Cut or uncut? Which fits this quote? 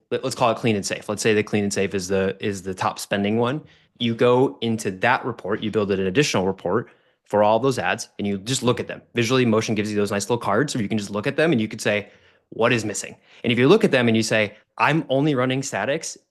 cut